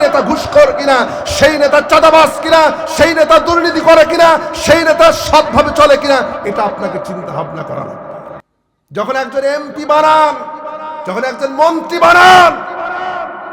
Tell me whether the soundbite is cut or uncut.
cut